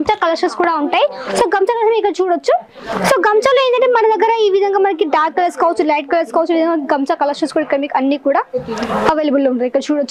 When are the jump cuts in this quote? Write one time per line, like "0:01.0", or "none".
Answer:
none